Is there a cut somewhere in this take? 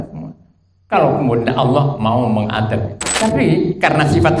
yes; 1 cut; at 3.0 s

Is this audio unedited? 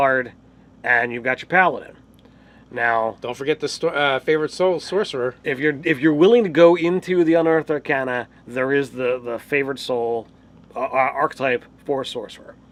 yes; 0 cuts

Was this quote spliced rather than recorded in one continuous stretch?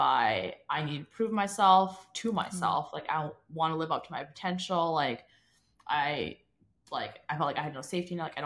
no; 0 cuts

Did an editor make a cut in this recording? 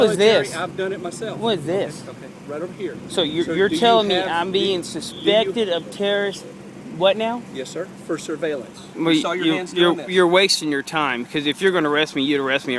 yes; 1 cut; at 8.8 s

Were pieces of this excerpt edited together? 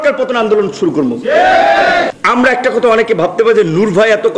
yes; 1 cut; at 2.1 s

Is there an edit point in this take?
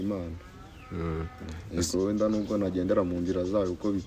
no; 0 cuts

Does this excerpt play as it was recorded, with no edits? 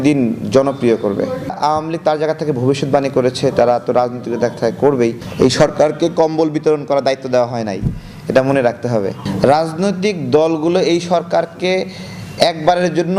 no; 3 cuts; at 1.5 s, 5.2 s, 9.2 s

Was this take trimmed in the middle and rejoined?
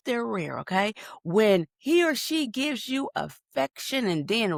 no; 0 cuts

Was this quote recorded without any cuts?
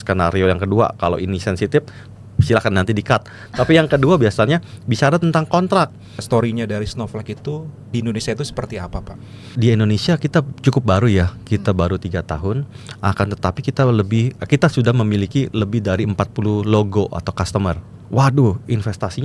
no; 3 cuts; at 6.2 s, 9.5 s, 17.9 s

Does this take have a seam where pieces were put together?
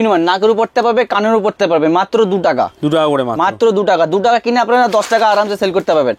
no; 0 cuts

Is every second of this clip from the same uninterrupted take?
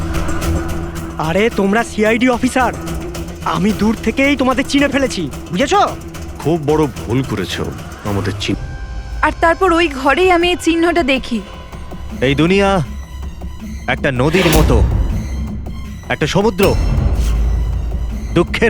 no; 1 cut; at 8.5 s

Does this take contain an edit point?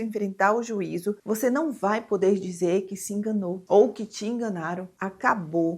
yes; 1 cut; at 1.2 s

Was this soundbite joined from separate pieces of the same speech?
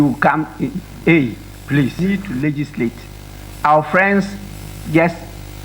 yes; 1 cut; at 1.9 s

